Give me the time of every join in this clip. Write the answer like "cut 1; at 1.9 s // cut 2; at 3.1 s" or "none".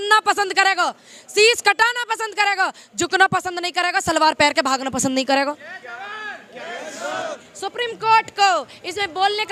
none